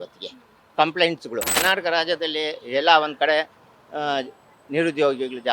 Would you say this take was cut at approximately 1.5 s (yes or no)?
yes